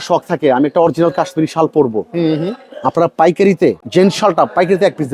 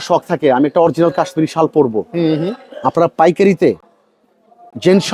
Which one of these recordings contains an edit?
first; 1 cut; at 3.8 s

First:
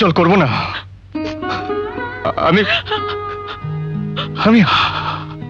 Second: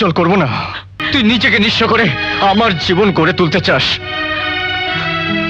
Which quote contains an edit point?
second; 1 cut; at 0.9 s

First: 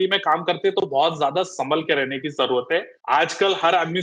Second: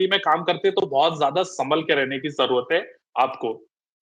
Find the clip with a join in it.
first; 1 cut; at 2.9 s

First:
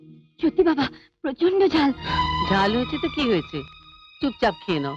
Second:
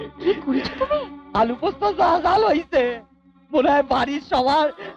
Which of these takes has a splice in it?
first; 1 cut; at 2.0 s

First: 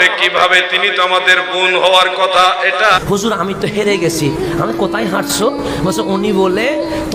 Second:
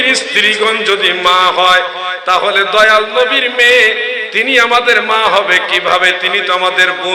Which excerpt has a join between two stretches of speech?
first; 1 cut; at 3.0 s

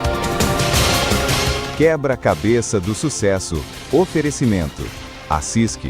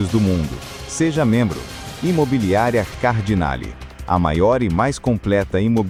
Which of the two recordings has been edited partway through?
first; 1 cut; at 1.5 s

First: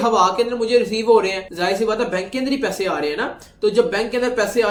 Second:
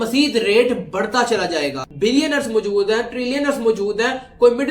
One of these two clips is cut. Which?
second; 1 cut; at 1.8 s

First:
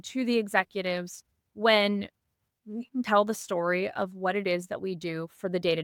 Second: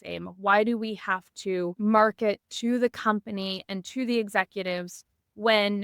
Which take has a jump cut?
second; 1 cut; at 1.7 s

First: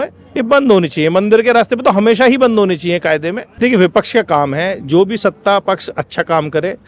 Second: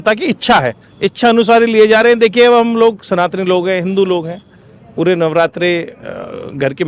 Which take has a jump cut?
first; 1 cut; at 3.4 s

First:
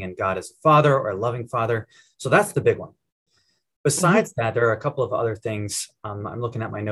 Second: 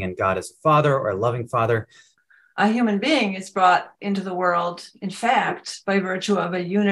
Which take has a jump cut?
second; 1 cut; at 2.1 s

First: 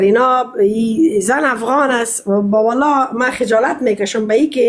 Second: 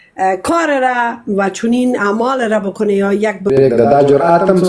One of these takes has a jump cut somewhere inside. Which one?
second; 1 cut; at 3.5 s

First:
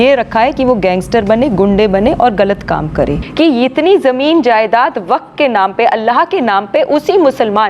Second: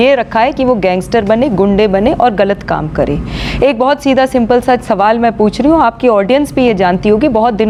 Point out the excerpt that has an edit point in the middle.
first; 1 cut; at 3.2 s

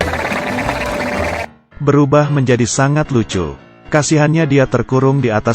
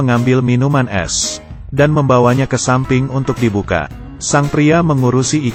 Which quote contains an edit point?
first; 1 cut; at 0.9 s

